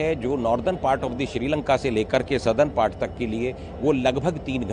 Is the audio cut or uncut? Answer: uncut